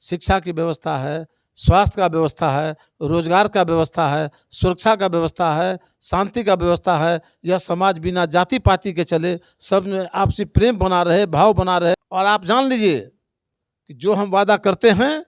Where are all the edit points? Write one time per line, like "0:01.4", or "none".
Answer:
0:12.0